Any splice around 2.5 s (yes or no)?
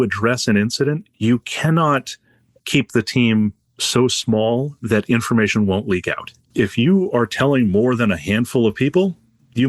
no